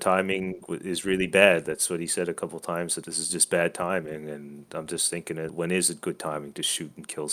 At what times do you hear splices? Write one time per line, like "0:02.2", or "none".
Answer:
0:03.0
0:05.5